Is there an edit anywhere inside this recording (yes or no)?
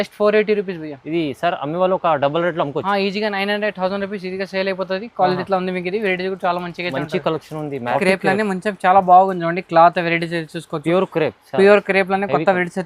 yes